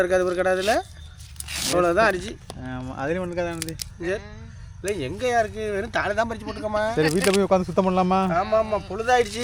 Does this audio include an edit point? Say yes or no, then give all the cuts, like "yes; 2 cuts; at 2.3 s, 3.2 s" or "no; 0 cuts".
no; 0 cuts